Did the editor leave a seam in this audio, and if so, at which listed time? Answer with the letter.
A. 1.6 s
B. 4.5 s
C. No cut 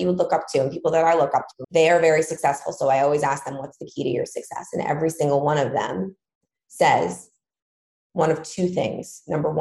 A